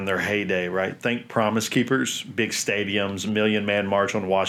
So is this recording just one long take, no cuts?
yes; 0 cuts

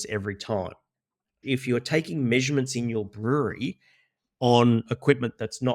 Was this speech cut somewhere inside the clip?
yes; 1 cut; at 1.4 s

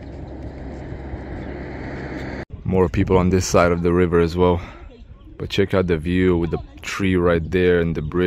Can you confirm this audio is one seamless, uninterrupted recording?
yes; 0 cuts

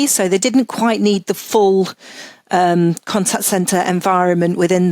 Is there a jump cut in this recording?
no; 0 cuts

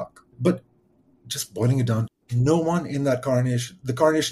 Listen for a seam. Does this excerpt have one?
yes; 1 cut; at 2.1 s

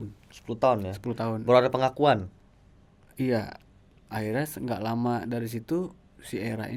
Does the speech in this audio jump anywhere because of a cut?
no; 0 cuts

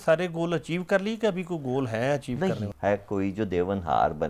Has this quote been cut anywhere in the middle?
yes; 1 cut; at 2.7 s

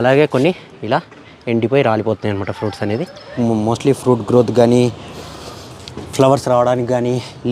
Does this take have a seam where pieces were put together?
yes; 1 cut; at 3.3 s

